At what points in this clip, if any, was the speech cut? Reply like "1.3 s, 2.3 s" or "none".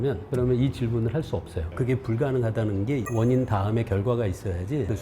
1.7 s, 3.1 s